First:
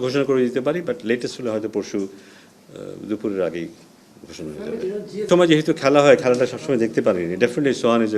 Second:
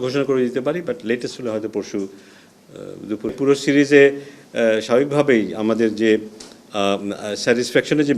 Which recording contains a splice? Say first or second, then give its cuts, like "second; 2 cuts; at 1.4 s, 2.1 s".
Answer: second; 1 cut; at 3.3 s